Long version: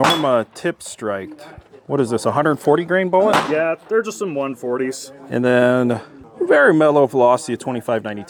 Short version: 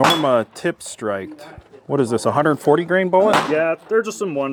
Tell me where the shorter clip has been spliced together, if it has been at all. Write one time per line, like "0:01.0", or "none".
none